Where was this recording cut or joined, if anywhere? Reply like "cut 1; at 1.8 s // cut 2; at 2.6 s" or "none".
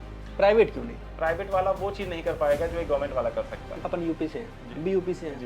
cut 1; at 1.1 s // cut 2; at 3.8 s